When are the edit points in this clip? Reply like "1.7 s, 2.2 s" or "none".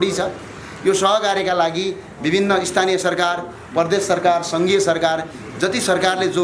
none